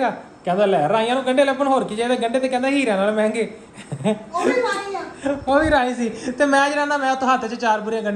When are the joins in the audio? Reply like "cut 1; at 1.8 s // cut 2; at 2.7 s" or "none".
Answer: none